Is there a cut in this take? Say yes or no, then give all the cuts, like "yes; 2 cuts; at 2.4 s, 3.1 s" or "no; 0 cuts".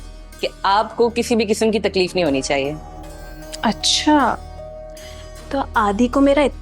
no; 0 cuts